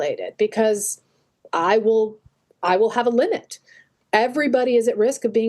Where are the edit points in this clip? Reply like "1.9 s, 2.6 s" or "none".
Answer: 3.9 s